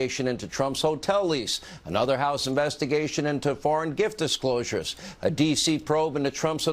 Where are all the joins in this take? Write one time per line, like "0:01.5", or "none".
0:02.1
0:05.2